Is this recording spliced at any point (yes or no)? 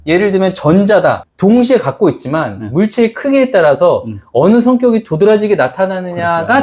yes